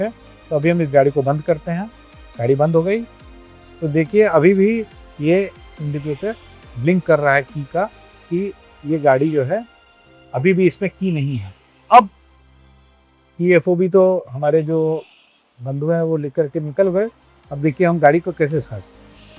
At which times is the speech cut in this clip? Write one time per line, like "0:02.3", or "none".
none